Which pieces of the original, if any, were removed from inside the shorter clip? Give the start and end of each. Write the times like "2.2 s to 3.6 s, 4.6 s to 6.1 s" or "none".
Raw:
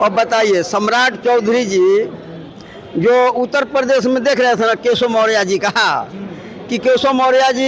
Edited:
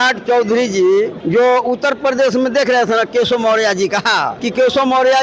2.2 s to 2.9 s, 6.0 s to 6.6 s

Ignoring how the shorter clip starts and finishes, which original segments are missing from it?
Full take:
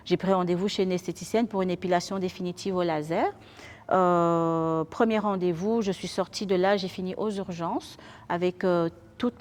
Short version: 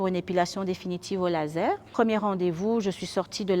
3.4 s to 4.9 s

